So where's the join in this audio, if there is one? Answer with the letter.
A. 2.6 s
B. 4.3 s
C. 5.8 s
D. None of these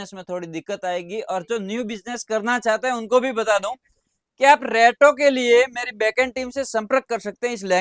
D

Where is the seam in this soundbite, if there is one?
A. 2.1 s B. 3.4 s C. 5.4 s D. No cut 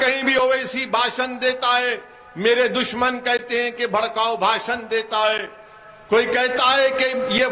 D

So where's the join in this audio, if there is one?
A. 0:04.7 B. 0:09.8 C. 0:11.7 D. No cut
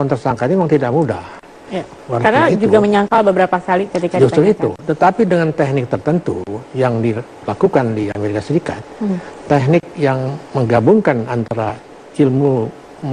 C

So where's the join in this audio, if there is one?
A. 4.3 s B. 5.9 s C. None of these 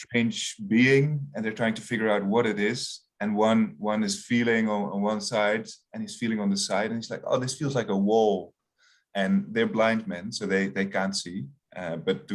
C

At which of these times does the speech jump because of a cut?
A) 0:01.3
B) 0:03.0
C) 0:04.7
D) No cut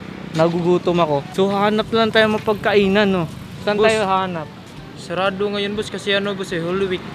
A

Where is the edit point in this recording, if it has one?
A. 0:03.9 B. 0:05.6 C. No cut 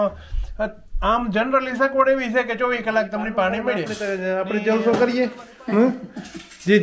A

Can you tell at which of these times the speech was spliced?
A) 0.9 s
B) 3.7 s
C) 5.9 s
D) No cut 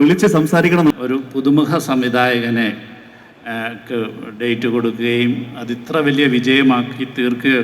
A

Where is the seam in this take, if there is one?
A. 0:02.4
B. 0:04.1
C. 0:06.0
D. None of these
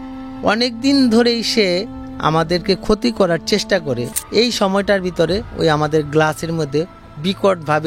B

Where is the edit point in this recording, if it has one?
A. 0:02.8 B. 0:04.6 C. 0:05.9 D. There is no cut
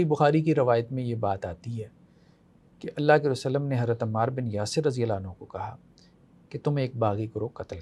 D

